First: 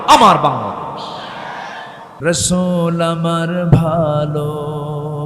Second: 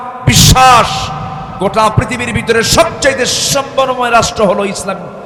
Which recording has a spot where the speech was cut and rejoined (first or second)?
first